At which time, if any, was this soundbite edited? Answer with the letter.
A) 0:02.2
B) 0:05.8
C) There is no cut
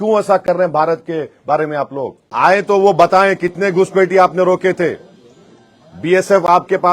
A